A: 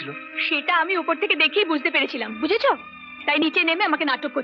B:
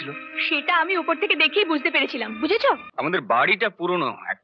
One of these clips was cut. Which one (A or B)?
B